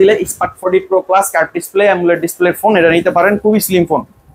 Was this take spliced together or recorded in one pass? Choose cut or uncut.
uncut